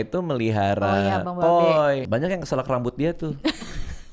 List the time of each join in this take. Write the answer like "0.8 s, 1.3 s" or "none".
2.1 s